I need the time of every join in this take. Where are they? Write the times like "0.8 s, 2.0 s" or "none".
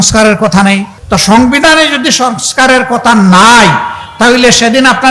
0.9 s